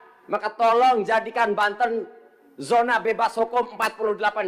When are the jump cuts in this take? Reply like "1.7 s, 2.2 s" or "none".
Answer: none